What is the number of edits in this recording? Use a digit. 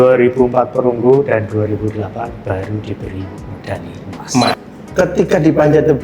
1